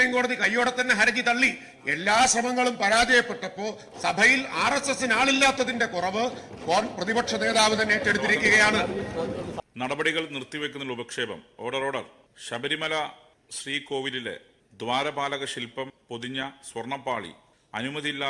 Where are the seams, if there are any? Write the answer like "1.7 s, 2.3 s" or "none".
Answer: 9.5 s